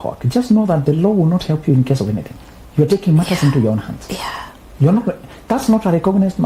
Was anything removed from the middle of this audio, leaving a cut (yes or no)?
no